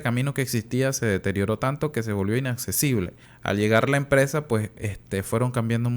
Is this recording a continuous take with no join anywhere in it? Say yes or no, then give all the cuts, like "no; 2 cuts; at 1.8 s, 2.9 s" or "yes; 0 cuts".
no; 1 cut; at 3.2 s